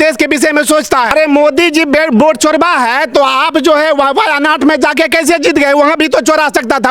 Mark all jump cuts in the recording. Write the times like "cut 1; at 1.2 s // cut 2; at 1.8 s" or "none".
cut 1; at 1.1 s